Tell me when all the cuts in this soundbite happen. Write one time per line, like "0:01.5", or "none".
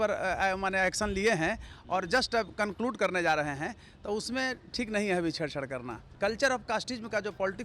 0:06.0